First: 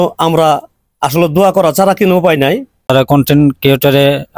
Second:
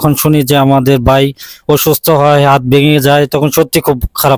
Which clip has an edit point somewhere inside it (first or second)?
first